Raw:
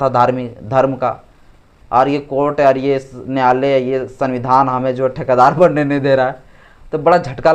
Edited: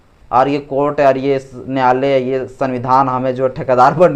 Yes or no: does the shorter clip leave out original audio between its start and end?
no